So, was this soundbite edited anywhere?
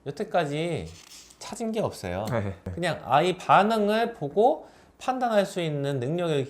yes; 1 cut; at 2.6 s

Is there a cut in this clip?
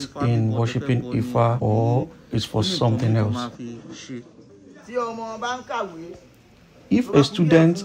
yes; 1 cut; at 4.3 s

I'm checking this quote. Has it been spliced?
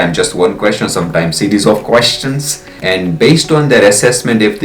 yes; 1 cut; at 2.8 s

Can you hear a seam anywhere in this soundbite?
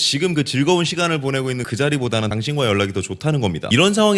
no; 0 cuts

